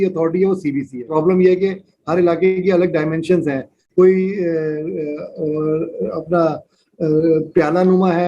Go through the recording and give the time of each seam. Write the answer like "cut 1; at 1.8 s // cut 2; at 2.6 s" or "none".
cut 1; at 1.0 s

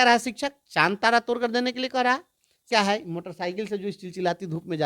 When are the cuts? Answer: cut 1; at 2.7 s

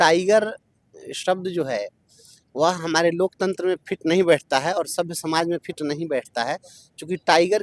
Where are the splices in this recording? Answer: none

